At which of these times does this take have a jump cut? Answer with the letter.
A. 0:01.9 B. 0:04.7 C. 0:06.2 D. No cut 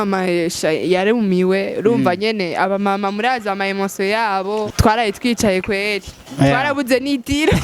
B